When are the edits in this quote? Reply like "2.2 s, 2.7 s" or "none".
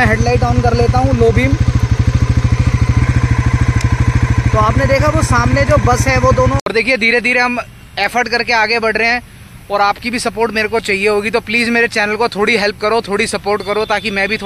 3.0 s, 6.7 s

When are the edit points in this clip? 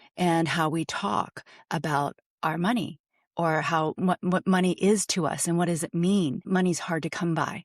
6.4 s

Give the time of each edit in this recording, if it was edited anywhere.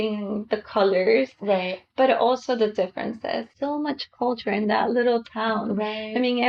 3.5 s

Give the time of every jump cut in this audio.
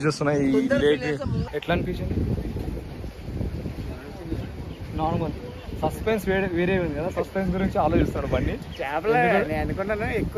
1.4 s

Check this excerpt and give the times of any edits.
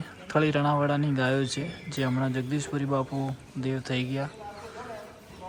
none

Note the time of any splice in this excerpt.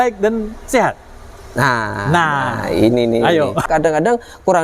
3.6 s

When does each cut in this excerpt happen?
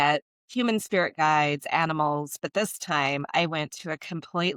none

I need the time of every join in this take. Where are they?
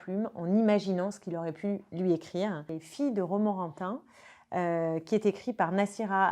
2.8 s

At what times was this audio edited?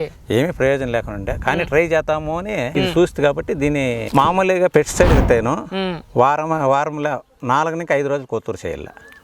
2.7 s, 4.0 s

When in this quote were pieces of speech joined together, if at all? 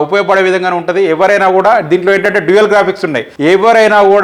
3.3 s

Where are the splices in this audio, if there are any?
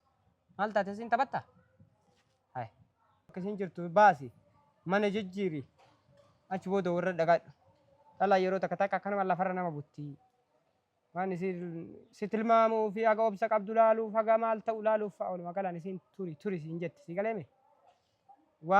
3.4 s

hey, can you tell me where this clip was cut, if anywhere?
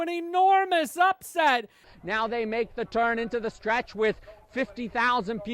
1.9 s

